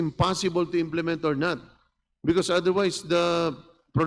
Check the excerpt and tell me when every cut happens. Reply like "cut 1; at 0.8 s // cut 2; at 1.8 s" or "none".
none